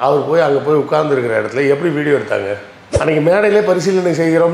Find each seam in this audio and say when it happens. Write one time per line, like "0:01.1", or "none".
0:02.9